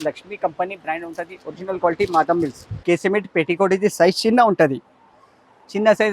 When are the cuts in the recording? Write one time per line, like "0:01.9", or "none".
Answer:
0:02.8